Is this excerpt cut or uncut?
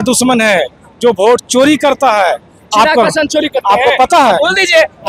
uncut